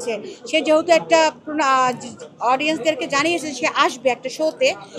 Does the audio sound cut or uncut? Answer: uncut